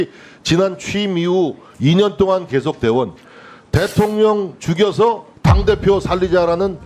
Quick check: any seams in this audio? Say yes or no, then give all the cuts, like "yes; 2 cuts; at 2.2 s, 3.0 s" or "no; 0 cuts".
no; 0 cuts